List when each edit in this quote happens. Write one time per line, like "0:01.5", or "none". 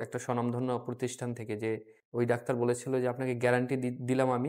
0:02.0

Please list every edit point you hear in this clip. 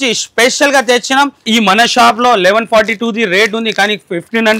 0:01.4

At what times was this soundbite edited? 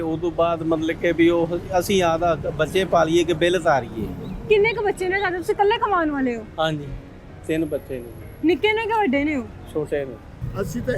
none

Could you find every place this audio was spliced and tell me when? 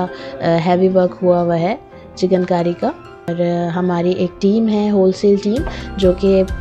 0:03.3

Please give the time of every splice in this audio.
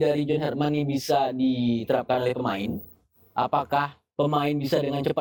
none

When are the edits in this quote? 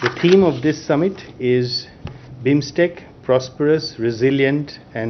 none

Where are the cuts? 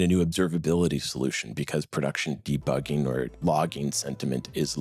0:03.4

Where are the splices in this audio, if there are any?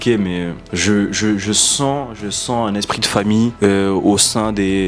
none

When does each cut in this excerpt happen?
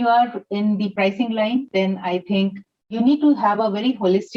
0:00.9
0:02.9

